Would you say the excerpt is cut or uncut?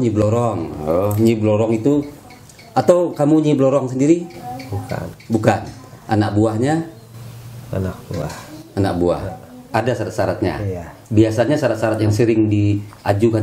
cut